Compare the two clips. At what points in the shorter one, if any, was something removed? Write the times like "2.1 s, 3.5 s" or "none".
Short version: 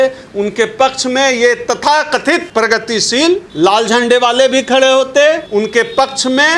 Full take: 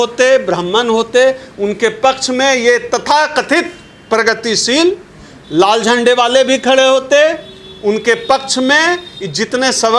2.5 s, 3.5 s, 5.4 s